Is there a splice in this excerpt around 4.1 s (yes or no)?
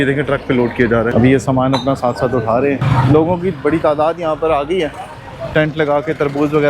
no